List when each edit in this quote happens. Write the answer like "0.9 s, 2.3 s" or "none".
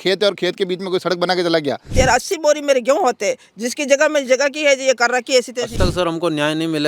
1.9 s, 5.7 s